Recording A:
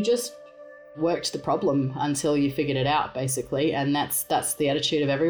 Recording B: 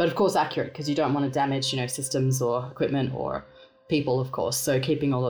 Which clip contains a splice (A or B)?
A